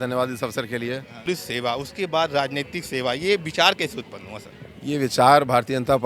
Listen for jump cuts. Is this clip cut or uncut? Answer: cut